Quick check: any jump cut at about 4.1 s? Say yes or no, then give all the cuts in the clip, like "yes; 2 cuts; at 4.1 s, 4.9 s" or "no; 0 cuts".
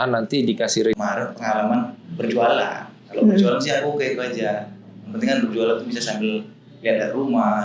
no; 1 cut; at 0.9 s